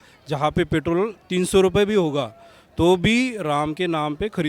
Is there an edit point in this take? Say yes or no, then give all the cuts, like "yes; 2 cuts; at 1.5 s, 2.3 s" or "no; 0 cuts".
no; 0 cuts